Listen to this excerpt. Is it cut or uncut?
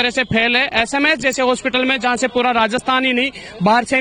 uncut